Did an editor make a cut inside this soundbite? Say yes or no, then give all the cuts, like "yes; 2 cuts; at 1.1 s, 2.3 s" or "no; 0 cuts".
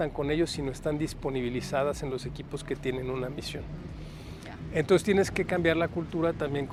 no; 0 cuts